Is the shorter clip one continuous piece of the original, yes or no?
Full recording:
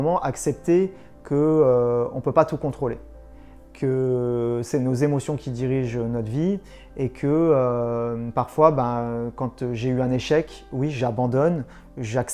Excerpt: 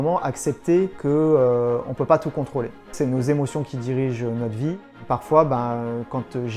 no